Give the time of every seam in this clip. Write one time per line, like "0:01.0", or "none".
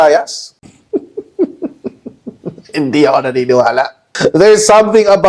0:04.0